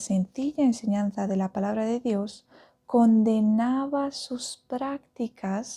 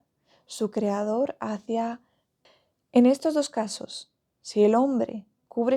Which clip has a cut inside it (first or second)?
second